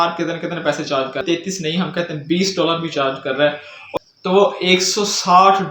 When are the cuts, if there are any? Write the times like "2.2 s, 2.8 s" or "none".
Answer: 1.2 s, 3.9 s